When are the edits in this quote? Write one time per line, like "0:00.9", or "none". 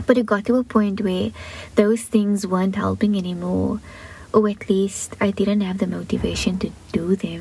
none